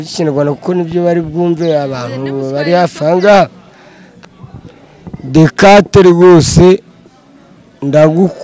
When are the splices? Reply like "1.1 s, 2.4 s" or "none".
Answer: 4.1 s